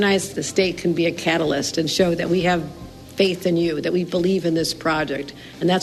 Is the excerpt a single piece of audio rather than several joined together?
yes; 0 cuts

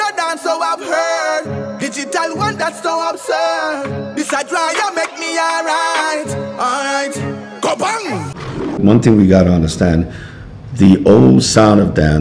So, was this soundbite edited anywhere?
yes; 1 cut; at 8.7 s

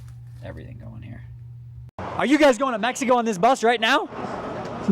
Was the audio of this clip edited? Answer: yes; 1 cut; at 1.9 s

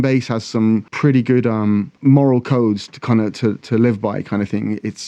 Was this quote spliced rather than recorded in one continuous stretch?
yes; 2 cuts; at 0.9 s, 1.9 s

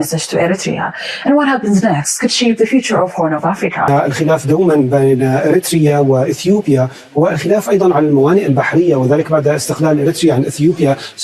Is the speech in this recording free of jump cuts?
no; 1 cut; at 3.9 s

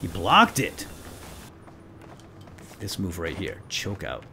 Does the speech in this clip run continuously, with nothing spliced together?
no; 1 cut; at 1.5 s

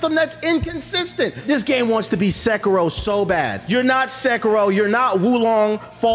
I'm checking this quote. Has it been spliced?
yes; 2 cuts; at 1.4 s, 3.6 s

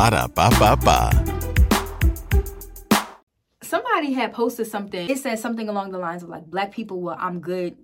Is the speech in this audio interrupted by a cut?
yes; 2 cuts; at 3.2 s, 5.1 s

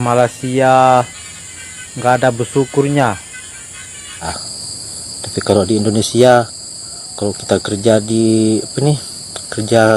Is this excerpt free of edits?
no; 1 cut; at 4.2 s

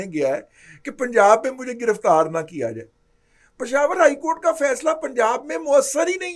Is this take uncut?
yes; 0 cuts

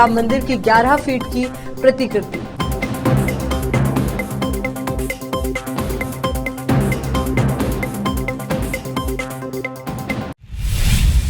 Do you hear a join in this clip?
yes; 1 cut; at 10.4 s

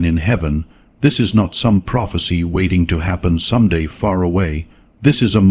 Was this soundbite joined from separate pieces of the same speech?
no; 0 cuts

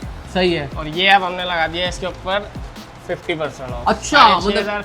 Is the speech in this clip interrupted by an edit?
no; 0 cuts

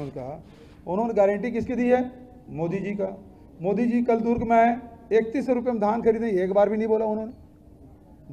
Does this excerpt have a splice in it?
no; 0 cuts

